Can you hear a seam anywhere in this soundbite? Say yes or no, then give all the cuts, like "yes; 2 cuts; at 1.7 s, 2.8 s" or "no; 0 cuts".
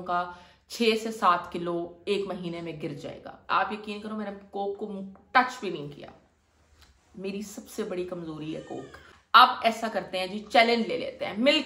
yes; 2 cuts; at 3.5 s, 9.2 s